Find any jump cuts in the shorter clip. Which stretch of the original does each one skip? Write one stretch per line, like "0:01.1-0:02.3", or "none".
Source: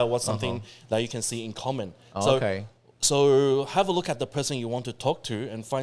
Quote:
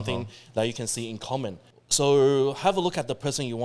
0:02.0-0:02.8